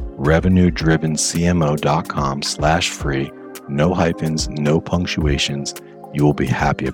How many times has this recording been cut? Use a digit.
0